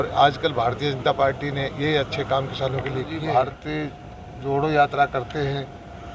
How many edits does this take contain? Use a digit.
1